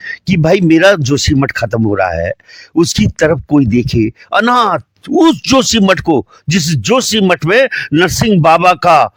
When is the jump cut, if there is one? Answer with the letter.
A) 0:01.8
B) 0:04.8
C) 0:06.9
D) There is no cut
D